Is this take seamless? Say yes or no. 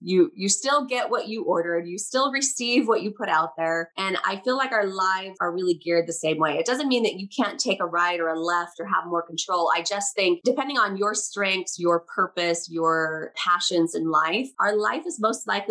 no